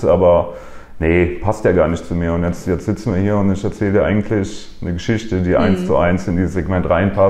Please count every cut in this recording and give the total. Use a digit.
0